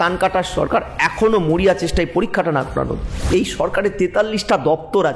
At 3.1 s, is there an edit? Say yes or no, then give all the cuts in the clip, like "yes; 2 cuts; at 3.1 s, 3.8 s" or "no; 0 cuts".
yes; 1 cut; at 3.1 s